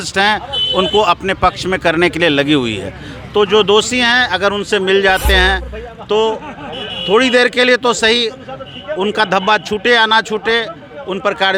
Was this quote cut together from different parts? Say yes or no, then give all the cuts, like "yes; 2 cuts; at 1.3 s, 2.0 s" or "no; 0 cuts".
no; 0 cuts